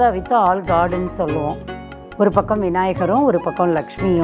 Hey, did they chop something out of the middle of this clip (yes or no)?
yes